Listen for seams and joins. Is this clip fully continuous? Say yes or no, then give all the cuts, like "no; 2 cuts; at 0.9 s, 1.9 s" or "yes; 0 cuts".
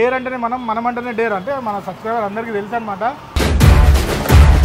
yes; 0 cuts